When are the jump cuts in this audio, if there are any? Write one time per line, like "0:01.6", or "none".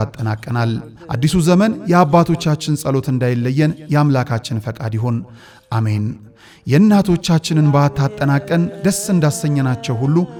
none